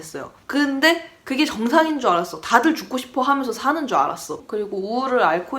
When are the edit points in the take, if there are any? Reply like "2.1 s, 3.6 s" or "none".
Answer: 4.4 s